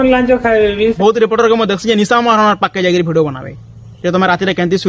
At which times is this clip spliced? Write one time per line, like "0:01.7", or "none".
0:00.9